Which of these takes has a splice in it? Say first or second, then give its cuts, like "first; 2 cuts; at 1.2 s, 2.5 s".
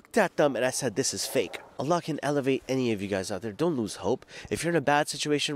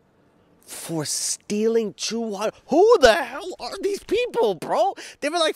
first; 1 cut; at 1.6 s